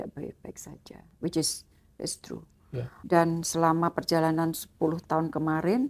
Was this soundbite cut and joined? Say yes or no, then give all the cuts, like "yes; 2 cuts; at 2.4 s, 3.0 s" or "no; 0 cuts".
yes; 1 cut; at 2.9 s